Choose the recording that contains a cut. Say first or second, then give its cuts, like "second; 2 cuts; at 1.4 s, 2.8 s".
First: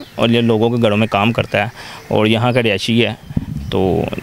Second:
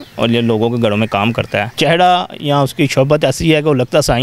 second; 1 cut; at 1.7 s